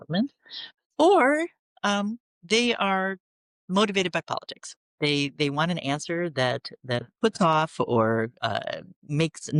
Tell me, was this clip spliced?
no; 0 cuts

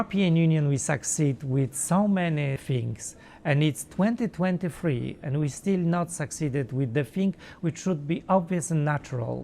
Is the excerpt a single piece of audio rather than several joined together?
no; 1 cut; at 2.6 s

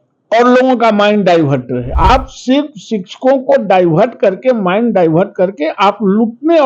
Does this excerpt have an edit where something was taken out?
yes; 1 cut; at 1.8 s

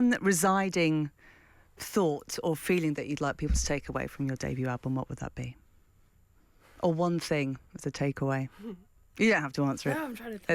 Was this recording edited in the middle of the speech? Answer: no; 0 cuts

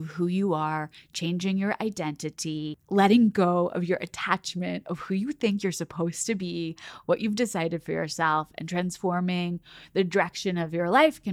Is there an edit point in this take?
no; 0 cuts

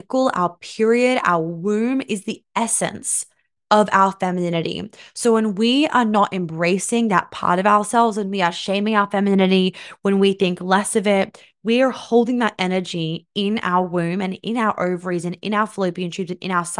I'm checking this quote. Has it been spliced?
no; 0 cuts

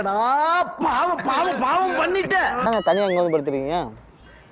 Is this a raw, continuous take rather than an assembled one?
no; 1 cut; at 2.7 s

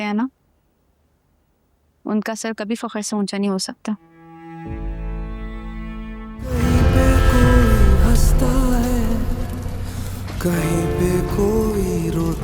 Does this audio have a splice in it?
yes; 1 cut; at 6.5 s

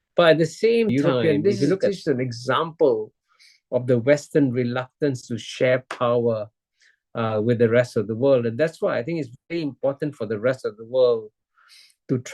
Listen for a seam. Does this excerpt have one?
yes; 1 cut; at 0.9 s

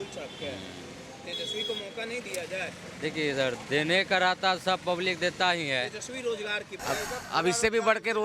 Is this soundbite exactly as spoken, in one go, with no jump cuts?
no; 1 cut; at 6.7 s

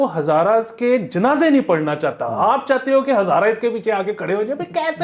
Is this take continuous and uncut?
yes; 0 cuts

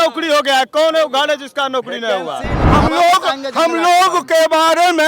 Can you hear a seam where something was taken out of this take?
yes; 1 cut; at 2.6 s

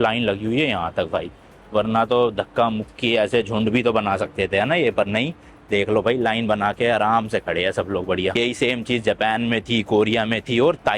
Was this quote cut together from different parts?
no; 0 cuts

